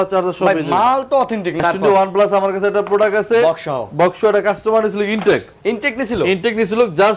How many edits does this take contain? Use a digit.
1